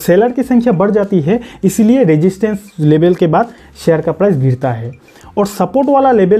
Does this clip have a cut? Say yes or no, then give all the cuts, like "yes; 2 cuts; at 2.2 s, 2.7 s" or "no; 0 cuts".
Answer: no; 0 cuts